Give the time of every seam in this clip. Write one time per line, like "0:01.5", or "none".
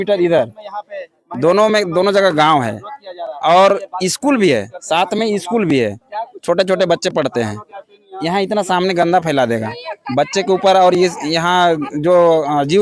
none